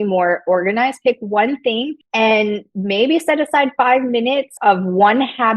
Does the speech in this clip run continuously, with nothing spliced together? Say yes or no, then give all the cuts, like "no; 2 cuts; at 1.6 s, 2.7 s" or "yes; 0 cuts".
no; 3 cuts; at 2.0 s, 2.7 s, 4.5 s